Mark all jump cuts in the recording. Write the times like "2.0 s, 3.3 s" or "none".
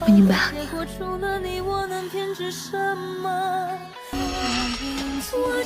4.1 s